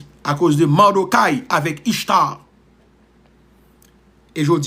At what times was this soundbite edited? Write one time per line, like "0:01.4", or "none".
none